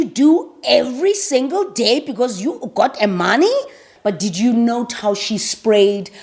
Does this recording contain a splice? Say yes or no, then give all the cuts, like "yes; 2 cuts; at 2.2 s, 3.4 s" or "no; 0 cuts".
yes; 1 cut; at 3.9 s